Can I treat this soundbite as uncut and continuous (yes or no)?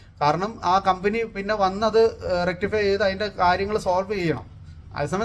yes